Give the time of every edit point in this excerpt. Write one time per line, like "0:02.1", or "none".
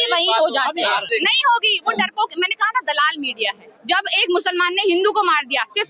0:01.1
0:03.7

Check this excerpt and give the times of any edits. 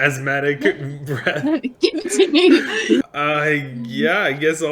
0:03.0

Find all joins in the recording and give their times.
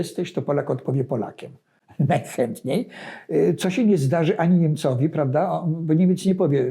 none

